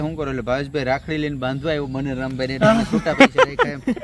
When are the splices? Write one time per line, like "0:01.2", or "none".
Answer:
none